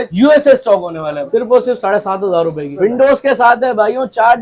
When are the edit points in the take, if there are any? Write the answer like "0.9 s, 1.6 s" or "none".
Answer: 1.2 s, 2.7 s